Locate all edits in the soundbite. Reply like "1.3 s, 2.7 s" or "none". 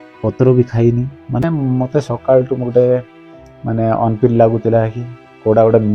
1.5 s